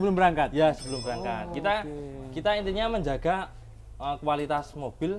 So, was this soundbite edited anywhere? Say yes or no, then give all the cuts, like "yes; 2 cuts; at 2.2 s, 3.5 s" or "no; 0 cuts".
no; 0 cuts